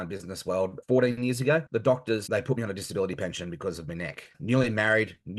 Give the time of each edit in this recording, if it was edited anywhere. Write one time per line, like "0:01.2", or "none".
0:00.8
0:01.9
0:04.4

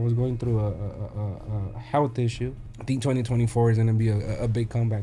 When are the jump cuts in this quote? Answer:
0:02.7

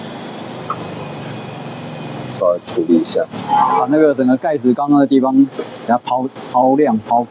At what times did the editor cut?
none

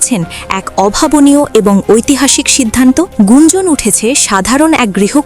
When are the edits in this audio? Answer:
0:03.1

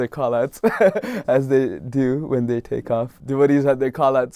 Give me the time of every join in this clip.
0:03.2

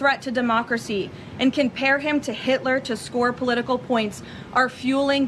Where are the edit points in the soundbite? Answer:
none

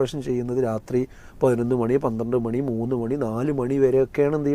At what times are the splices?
none

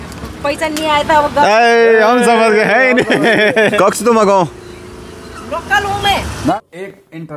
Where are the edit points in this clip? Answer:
0:03.7
0:06.5

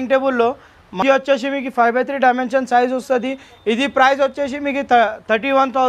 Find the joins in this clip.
0:01.0

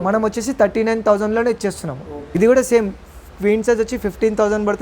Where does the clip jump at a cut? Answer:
0:02.3

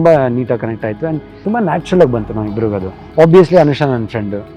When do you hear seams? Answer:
0:01.3
0:02.9

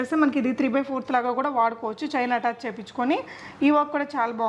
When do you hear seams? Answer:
none

